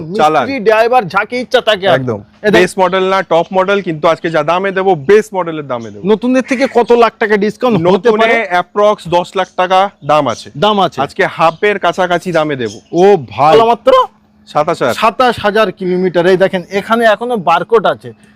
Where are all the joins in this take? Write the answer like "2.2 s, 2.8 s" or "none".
2.6 s, 13.5 s

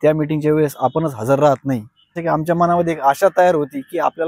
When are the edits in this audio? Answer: 2.2 s

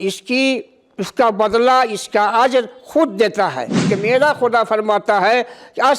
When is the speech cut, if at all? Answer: 3.9 s

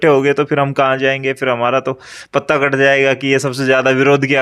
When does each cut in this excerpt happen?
none

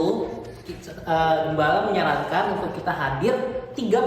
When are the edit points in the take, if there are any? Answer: none

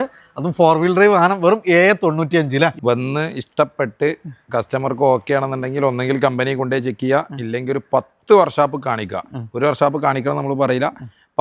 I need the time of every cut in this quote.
2.8 s

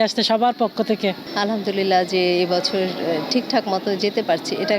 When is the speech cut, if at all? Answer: 1.2 s

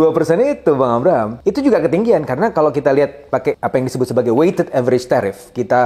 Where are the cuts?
1.3 s, 3.6 s

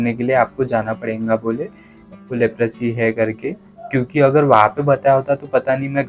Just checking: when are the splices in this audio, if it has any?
2.2 s

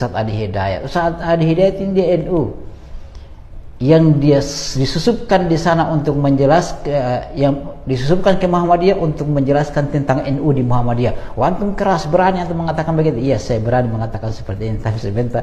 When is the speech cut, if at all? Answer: none

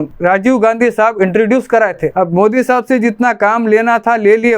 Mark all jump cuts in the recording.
2.1 s

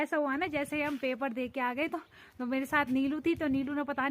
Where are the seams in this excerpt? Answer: none

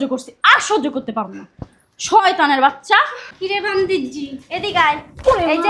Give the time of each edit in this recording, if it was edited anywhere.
3.2 s

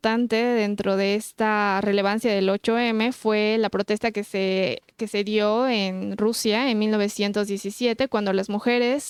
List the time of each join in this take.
none

